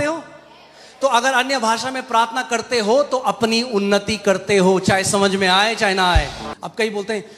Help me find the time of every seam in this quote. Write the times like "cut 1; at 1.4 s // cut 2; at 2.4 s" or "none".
cut 1; at 6.4 s